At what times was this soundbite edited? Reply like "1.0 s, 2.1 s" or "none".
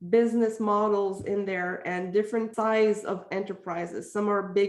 2.5 s